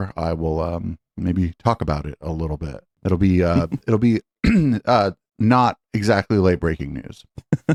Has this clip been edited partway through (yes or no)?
no